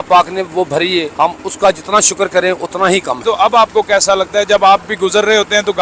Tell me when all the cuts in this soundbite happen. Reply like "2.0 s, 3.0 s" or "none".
1.1 s, 3.2 s